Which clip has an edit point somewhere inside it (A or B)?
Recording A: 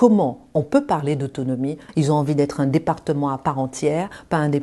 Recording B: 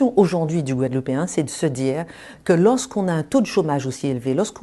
A